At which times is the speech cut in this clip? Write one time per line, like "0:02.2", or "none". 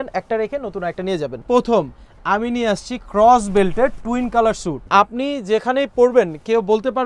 0:01.4
0:04.8